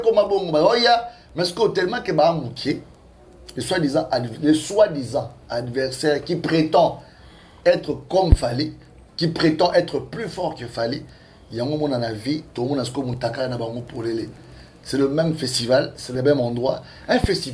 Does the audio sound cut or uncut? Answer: uncut